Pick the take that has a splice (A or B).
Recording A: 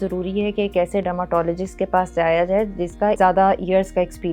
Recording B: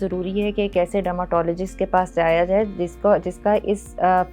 A